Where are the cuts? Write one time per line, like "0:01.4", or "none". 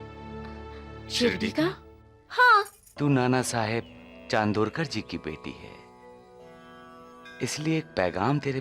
0:02.8